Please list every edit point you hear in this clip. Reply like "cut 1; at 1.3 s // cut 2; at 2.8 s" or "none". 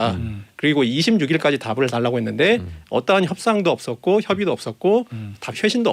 none